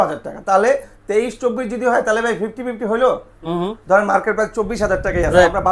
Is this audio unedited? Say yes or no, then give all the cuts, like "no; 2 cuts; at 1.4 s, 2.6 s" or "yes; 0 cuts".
yes; 0 cuts